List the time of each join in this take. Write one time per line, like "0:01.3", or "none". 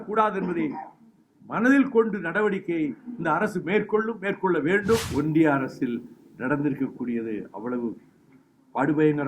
0:05.1